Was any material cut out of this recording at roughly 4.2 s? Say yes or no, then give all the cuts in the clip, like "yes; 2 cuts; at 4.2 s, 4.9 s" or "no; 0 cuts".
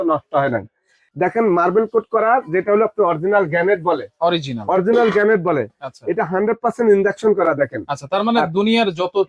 no; 1 cut; at 1.0 s